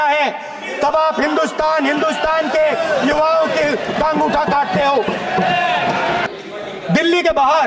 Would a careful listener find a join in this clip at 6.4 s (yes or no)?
no